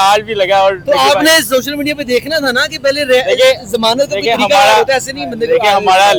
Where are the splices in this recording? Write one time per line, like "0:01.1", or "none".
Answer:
none